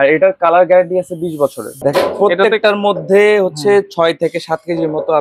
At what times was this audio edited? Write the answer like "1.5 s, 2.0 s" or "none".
1.7 s